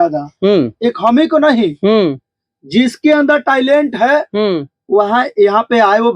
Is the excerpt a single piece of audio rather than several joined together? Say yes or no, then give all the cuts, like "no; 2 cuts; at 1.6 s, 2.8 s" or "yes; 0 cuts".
yes; 0 cuts